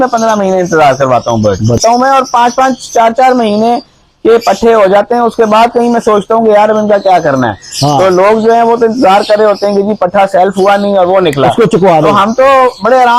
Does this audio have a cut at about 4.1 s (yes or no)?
no